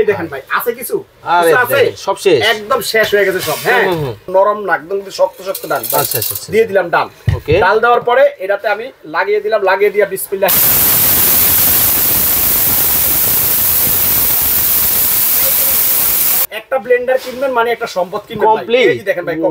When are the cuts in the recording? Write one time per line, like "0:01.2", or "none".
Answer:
0:04.2
0:16.5

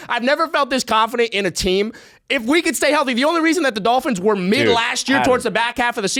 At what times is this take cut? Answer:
none

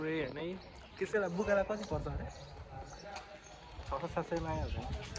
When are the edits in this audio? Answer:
0:01.1

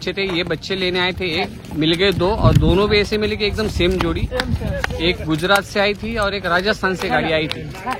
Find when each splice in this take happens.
none

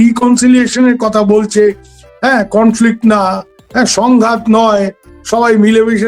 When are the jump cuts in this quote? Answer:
none

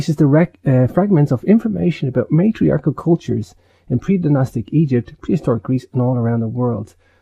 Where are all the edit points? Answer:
0:05.0

